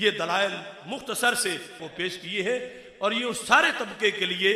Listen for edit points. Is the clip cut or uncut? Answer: cut